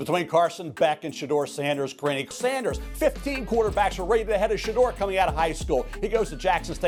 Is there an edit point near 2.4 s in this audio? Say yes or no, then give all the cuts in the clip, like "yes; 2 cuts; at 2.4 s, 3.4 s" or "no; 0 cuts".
no; 0 cuts